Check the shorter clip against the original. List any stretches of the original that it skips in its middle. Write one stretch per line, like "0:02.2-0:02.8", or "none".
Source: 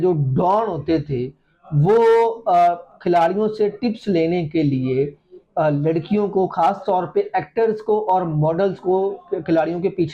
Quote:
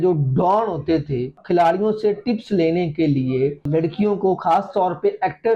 0:01.3-0:02.9
0:05.2-0:05.8